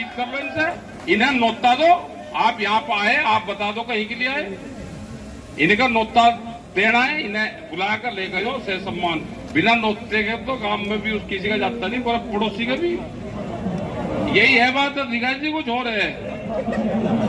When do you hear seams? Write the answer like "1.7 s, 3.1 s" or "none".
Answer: none